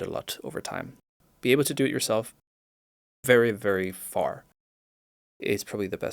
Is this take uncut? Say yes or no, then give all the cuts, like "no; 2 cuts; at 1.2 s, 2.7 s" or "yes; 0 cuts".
no; 1 cut; at 1.2 s